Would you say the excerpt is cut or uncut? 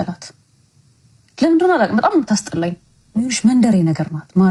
uncut